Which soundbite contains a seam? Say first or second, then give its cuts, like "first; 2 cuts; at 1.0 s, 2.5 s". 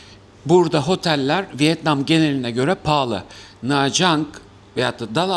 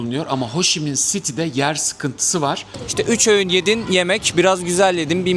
second; 1 cut; at 2.7 s